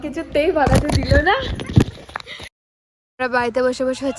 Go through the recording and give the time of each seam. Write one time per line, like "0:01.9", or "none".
none